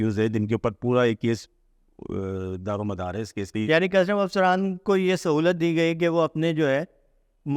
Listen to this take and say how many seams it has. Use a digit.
1